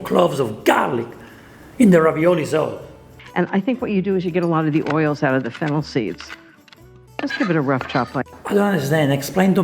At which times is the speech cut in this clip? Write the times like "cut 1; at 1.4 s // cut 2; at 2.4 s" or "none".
cut 1; at 3.0 s